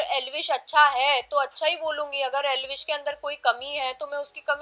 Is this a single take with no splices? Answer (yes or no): yes